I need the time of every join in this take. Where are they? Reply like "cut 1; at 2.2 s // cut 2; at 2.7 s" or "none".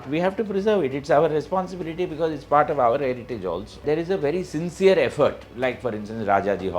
cut 1; at 3.8 s